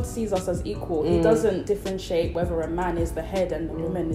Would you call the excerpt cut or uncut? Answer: uncut